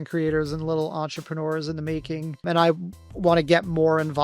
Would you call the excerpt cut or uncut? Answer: cut